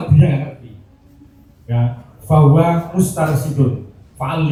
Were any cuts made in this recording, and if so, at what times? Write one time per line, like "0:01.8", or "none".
none